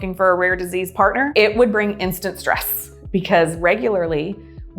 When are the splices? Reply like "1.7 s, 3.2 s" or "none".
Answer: none